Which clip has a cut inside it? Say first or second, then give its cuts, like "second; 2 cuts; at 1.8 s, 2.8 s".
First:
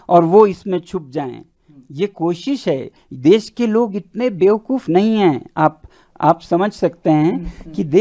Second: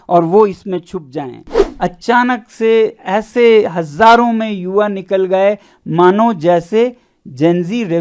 second; 1 cut; at 1.6 s